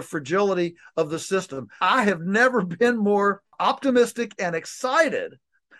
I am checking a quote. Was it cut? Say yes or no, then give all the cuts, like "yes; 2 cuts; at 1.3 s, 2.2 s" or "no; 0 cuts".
yes; 2 cuts; at 1.8 s, 3.5 s